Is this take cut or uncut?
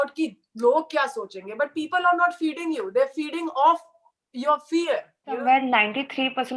cut